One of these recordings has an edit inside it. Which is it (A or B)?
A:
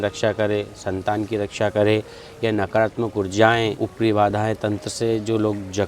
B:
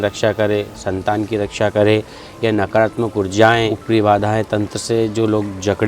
B